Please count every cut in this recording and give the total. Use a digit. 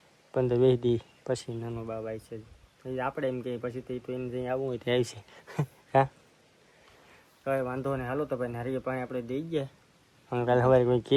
0